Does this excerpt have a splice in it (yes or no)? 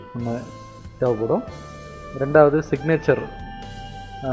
yes